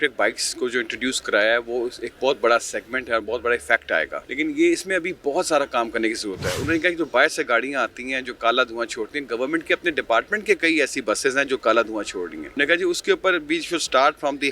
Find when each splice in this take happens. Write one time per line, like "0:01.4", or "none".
0:04.2
0:12.4